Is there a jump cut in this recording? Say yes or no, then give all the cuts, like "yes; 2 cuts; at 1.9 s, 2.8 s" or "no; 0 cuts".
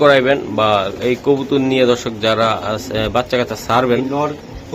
no; 0 cuts